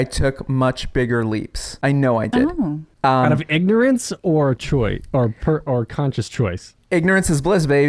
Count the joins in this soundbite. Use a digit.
2